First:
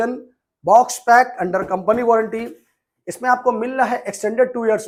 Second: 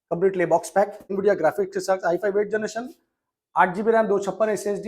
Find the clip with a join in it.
second; 1 cut; at 1.2 s

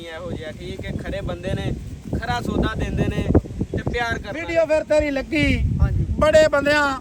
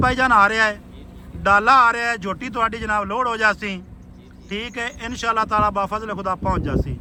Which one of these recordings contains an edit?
first; 1 cut; at 4.3 s

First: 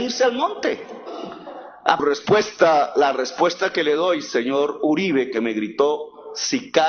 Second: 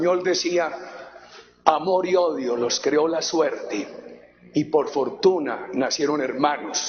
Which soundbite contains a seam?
first; 1 cut; at 2.0 s

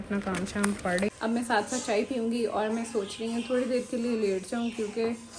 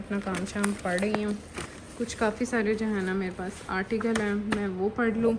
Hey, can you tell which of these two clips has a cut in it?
first; 1 cut; at 1.1 s

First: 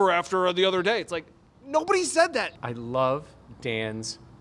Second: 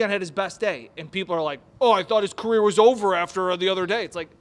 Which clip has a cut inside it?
first; 1 cut; at 2.5 s

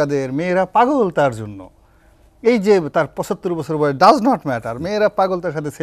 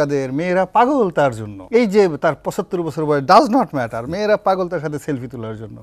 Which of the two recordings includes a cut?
second; 1 cut; at 1.5 s

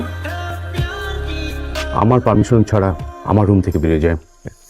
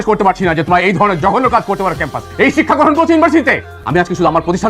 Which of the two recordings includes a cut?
second; 1 cut; at 3.7 s

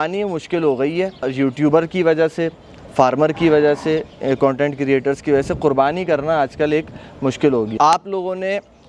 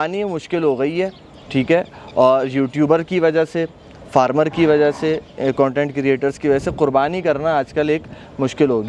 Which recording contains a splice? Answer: first; 2 cuts; at 1.3 s, 7.7 s

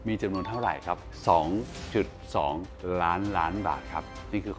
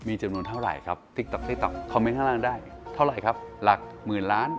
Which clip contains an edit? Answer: first; 1 cut; at 1.1 s

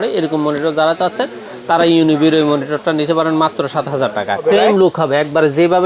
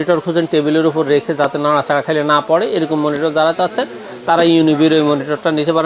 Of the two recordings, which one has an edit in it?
first; 1 cut; at 4.4 s

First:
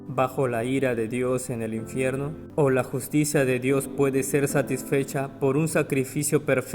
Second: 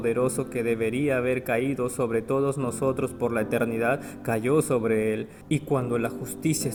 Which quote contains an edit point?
first; 1 cut; at 2.4 s

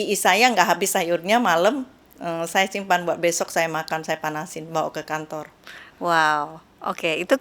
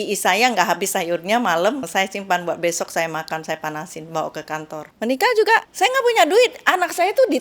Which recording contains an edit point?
second; 3 cuts; at 1.9 s, 4.8 s, 5.7 s

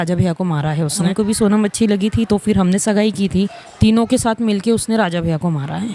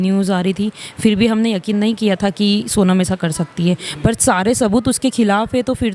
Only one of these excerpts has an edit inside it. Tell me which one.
first; 2 cuts; at 1.0 s, 3.6 s

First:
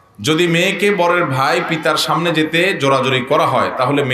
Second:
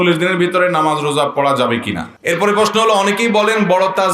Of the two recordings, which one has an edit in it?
second; 1 cut; at 2.1 s

